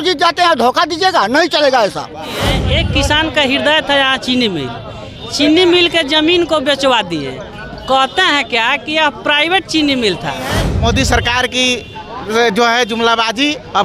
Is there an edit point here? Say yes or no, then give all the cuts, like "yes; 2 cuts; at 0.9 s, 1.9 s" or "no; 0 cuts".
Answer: yes; 2 cuts; at 2.5 s, 10.7 s